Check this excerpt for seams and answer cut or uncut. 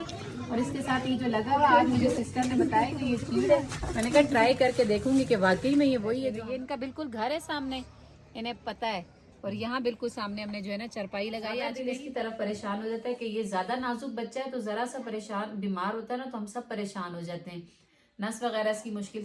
cut